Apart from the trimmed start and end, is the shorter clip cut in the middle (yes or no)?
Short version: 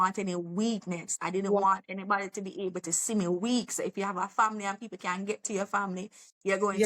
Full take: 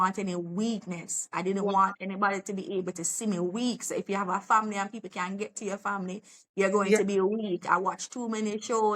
yes